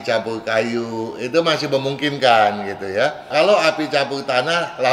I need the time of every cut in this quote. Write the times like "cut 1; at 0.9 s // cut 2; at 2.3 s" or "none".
cut 1; at 3.3 s